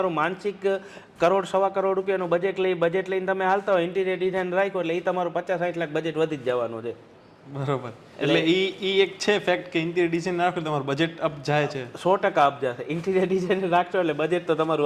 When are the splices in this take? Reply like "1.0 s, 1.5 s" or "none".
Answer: none